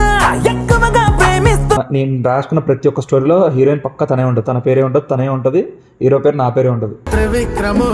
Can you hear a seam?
yes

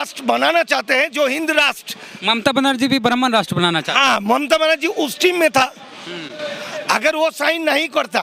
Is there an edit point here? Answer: no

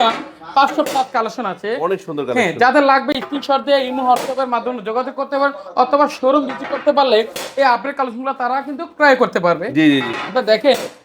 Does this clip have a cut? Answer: no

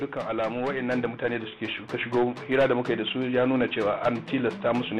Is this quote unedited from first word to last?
yes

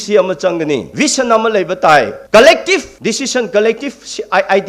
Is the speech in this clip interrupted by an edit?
yes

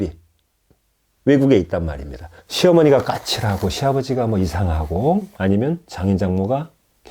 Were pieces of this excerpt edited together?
yes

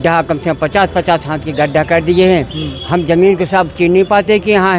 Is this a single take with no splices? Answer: yes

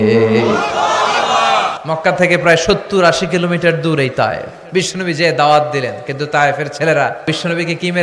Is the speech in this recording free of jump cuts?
no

